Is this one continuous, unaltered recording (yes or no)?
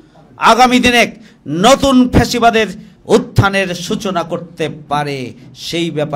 no